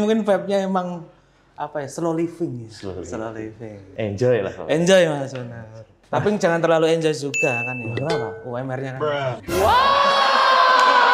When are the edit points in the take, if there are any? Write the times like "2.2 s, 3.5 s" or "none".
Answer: none